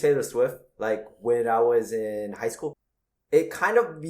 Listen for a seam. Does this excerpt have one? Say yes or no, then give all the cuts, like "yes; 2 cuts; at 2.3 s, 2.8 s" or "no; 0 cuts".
yes; 1 cut; at 2.8 s